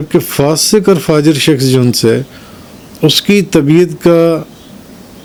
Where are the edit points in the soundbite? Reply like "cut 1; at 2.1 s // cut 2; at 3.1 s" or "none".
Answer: none